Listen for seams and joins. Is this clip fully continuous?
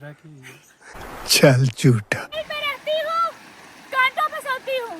no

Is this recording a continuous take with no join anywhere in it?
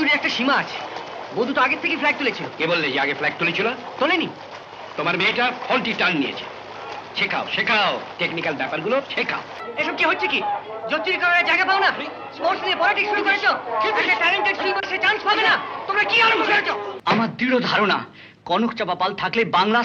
no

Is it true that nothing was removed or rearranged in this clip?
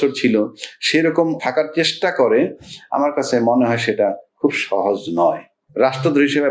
no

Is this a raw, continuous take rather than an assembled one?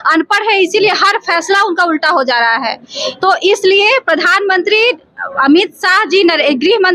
yes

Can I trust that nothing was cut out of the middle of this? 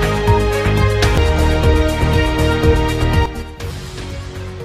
no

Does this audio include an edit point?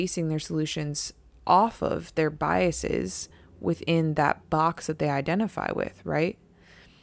no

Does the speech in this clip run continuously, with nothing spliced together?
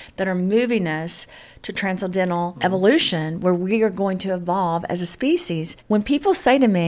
no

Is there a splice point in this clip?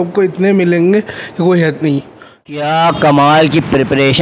yes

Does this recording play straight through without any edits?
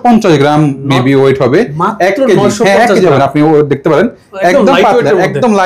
yes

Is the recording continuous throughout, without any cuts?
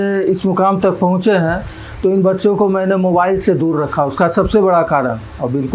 yes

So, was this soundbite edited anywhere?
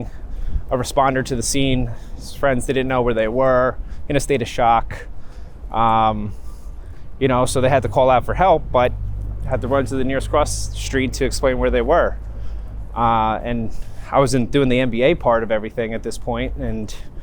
no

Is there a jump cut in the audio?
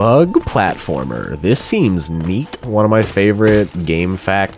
yes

